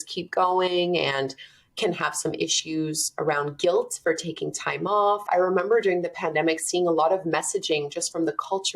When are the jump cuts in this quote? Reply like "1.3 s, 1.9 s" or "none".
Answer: 5.2 s